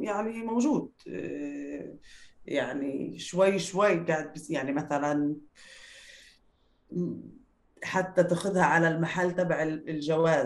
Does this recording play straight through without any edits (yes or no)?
yes